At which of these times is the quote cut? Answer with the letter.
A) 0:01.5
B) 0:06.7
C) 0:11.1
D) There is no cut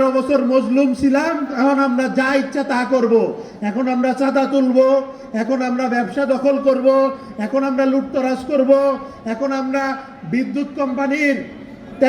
A